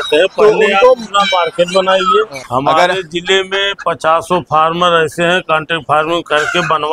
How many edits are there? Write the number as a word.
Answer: one